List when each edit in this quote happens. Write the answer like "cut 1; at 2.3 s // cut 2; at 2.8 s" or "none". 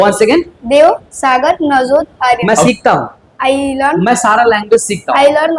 cut 1; at 2.5 s

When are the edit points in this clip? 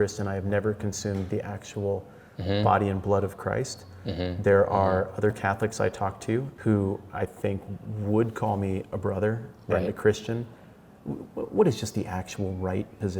cut 1; at 6.5 s

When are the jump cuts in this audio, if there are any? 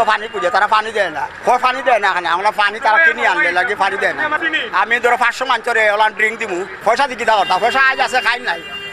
cut 1; at 1.3 s // cut 2; at 4.3 s // cut 3; at 6.7 s

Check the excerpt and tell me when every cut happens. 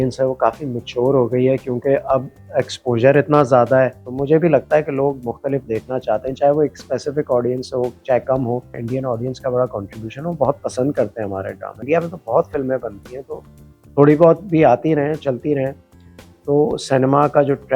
cut 1; at 4.1 s // cut 2; at 8.8 s // cut 3; at 11.8 s

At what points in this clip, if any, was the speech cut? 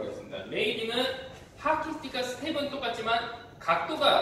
none

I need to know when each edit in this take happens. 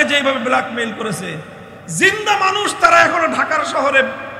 none

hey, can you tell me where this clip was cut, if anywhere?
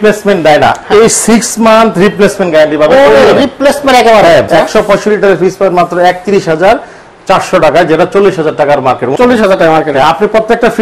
cut 1; at 4.5 s // cut 2; at 9.1 s

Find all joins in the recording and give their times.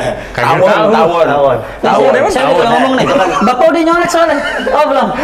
none

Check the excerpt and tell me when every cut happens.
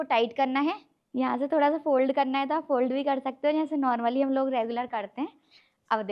cut 1; at 0.9 s

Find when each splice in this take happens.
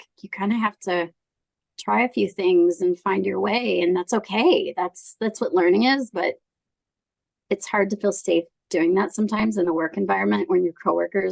none

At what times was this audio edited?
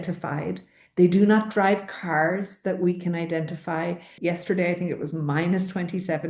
cut 1; at 4.1 s

